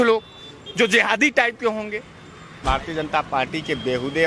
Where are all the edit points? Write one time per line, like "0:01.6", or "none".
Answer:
0:02.6